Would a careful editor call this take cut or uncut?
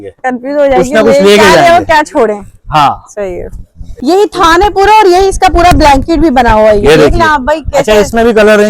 cut